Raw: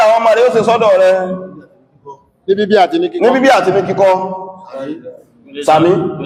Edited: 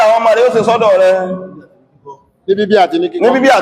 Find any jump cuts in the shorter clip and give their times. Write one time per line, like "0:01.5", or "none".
none